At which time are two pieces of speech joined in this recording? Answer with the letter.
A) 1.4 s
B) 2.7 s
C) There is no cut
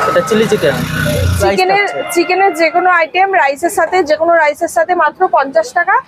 A